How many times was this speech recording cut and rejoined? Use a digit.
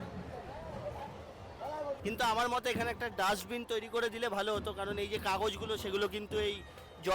1